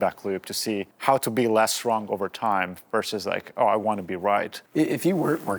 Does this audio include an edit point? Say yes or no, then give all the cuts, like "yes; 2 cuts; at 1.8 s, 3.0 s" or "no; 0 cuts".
yes; 2 cuts; at 0.9 s, 4.6 s